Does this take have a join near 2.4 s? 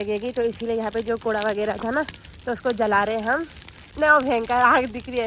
no; 1 cut; at 3.9 s

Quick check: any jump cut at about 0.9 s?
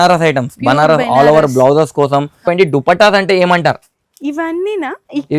no; 1 cut; at 2.5 s

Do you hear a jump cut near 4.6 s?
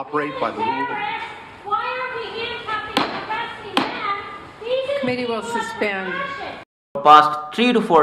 no; 1 cut; at 6.9 s

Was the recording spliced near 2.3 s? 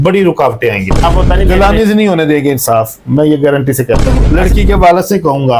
no; 2 cuts; at 1.0 s, 4.2 s

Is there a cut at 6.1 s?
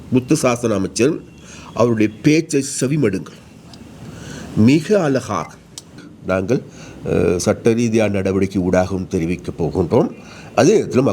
yes; 1 cut; at 6.1 s

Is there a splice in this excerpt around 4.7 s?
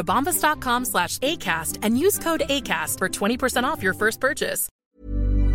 yes; 1 cut; at 4.7 s

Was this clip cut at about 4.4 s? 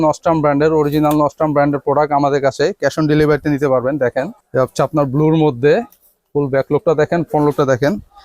yes; 1 cut; at 4.4 s

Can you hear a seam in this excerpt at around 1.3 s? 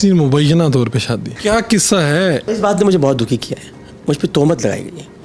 yes; 2 cuts; at 1.3 s, 2.4 s

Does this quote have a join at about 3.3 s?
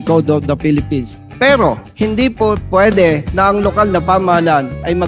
yes; 3 cuts; at 1.2 s, 1.9 s, 3.3 s

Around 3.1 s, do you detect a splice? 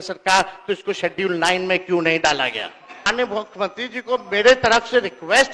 yes; 1 cut; at 3.1 s

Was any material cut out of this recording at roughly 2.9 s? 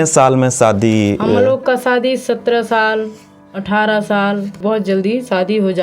no; 1 cut; at 4.6 s

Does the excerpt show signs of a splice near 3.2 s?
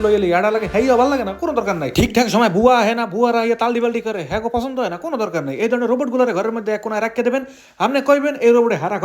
no; 0 cuts

